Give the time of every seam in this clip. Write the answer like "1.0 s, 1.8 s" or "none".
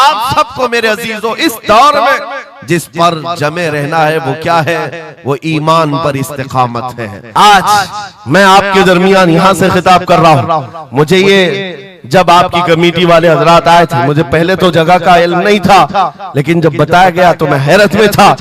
7.2 s